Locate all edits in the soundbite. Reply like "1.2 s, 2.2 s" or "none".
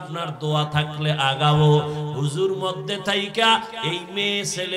none

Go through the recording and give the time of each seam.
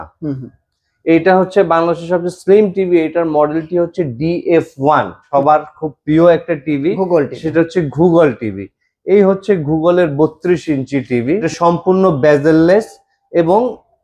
5.2 s, 11.5 s

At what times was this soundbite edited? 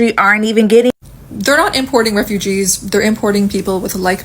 1.0 s

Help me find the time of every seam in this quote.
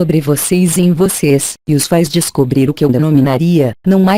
none

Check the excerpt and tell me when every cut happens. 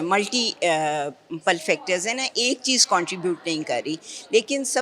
none

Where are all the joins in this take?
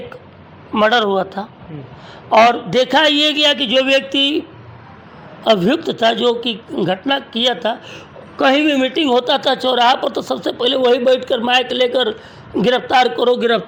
none

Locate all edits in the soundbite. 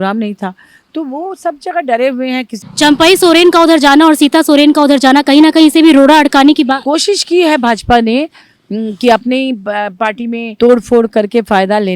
2.6 s, 6.8 s, 10.5 s

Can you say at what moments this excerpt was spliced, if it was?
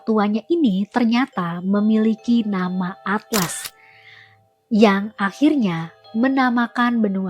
none

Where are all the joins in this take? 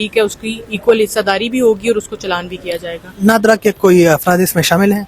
none

